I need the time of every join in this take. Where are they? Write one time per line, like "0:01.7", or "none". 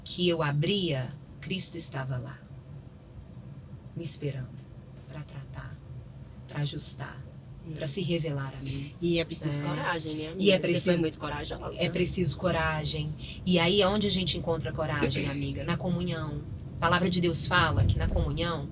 none